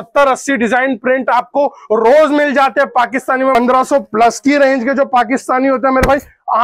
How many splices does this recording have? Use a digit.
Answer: 1